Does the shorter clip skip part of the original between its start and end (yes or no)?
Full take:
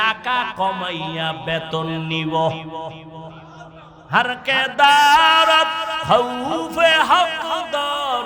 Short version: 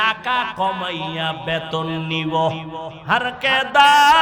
yes